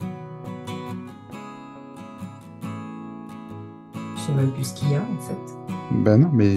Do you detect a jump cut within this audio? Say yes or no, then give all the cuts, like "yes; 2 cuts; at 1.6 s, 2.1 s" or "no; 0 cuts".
yes; 1 cut; at 4.3 s